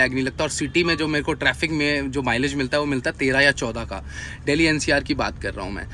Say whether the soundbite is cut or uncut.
uncut